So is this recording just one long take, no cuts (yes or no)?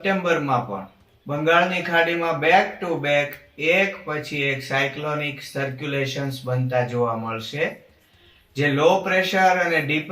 yes